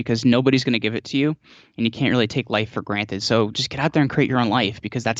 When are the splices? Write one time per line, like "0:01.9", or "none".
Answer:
none